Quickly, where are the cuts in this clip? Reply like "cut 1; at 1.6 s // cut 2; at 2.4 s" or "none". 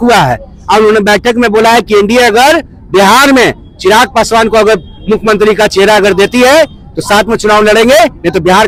none